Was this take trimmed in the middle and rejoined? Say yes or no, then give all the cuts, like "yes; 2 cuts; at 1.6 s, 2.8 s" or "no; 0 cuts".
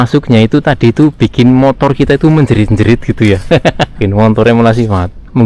yes; 1 cut; at 4.0 s